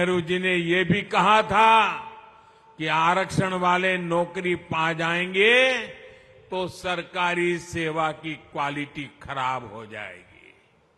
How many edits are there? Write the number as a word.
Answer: zero